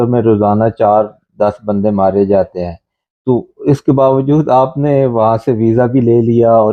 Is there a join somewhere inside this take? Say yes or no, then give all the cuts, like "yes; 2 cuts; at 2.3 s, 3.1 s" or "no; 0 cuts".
no; 0 cuts